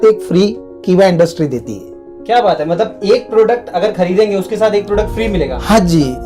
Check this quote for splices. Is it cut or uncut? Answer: uncut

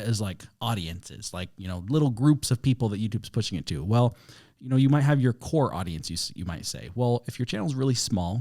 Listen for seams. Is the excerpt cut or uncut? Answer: uncut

